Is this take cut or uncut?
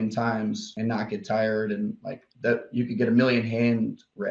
uncut